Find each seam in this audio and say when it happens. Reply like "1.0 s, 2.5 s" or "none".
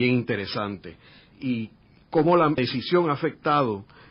2.8 s